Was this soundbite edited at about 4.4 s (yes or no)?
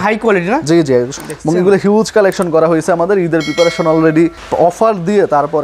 yes